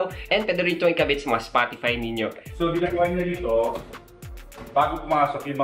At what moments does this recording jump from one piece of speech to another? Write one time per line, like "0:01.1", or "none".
0:02.4